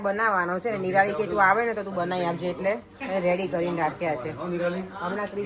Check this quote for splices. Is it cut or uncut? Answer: uncut